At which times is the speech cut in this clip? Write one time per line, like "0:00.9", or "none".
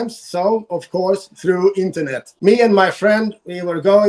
0:02.2